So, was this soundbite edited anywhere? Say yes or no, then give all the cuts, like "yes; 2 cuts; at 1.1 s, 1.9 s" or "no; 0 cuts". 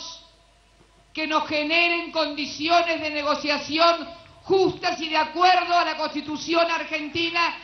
no; 0 cuts